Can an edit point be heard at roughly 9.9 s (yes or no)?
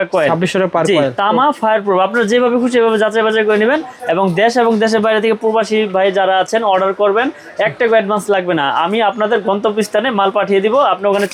no